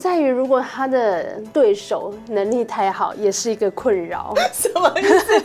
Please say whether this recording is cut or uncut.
cut